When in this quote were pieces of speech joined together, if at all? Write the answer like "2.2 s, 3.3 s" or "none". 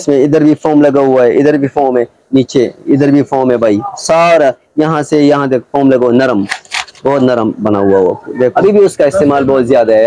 8.5 s